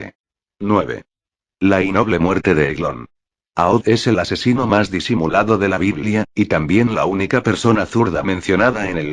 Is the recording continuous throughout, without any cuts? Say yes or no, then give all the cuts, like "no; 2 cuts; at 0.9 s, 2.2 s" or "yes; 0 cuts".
no; 1 cut; at 7.9 s